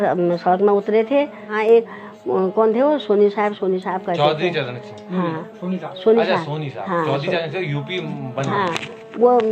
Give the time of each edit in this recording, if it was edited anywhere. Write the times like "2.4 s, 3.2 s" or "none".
1.5 s